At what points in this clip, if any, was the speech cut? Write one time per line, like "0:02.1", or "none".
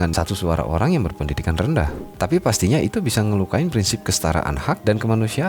0:02.0